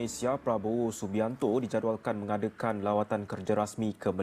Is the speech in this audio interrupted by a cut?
no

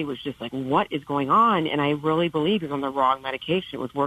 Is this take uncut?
yes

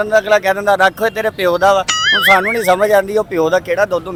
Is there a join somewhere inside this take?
no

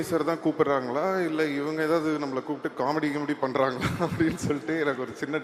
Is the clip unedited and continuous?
yes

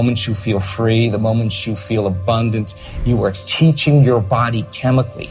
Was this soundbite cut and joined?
no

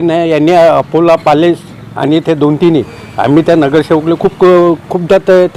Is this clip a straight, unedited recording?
yes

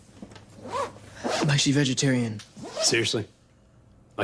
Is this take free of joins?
yes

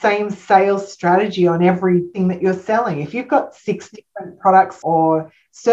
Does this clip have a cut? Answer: yes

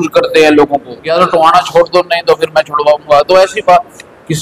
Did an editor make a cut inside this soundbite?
yes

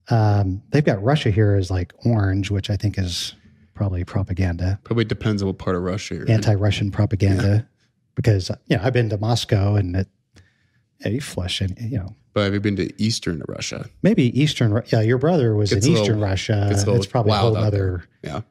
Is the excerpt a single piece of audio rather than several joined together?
yes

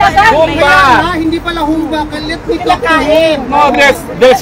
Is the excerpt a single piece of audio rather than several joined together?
yes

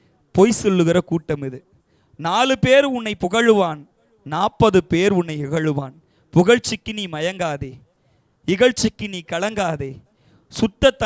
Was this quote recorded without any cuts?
yes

